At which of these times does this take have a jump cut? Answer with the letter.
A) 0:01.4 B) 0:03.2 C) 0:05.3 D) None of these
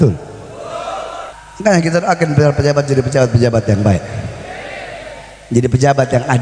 A